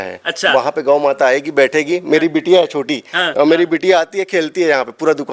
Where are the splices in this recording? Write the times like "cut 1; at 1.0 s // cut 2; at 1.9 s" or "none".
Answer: cut 1; at 3.3 s